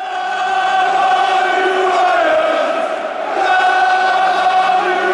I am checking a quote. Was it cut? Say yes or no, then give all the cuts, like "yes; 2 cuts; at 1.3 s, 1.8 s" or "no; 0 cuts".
no; 0 cuts